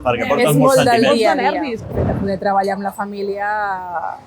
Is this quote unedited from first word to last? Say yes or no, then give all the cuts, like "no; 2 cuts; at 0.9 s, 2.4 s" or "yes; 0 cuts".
no; 1 cut; at 1.8 s